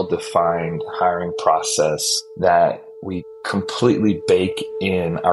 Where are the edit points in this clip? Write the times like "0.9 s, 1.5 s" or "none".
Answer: none